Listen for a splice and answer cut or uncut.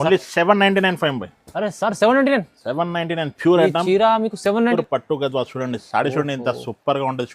cut